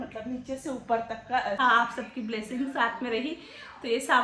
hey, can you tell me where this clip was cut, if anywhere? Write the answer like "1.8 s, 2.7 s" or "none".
1.6 s